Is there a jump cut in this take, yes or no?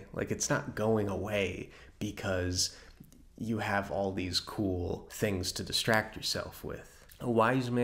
yes